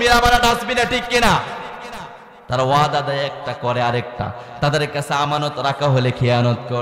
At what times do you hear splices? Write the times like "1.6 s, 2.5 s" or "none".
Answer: none